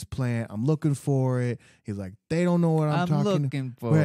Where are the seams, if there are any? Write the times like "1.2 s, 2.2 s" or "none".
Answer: none